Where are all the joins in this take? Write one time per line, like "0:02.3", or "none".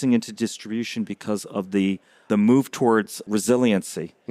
0:02.2
0:03.3